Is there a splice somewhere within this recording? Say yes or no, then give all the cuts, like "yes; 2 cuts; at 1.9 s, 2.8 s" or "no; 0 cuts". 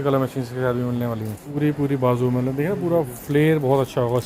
yes; 1 cut; at 1.4 s